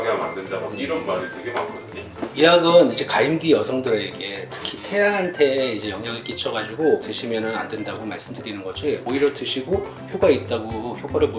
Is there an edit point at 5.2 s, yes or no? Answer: no